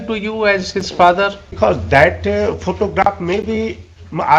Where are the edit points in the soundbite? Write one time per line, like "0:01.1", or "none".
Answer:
0:01.6